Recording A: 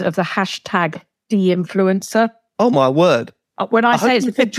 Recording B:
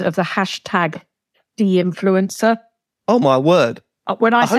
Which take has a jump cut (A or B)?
A